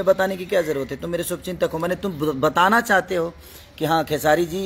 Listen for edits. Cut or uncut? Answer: uncut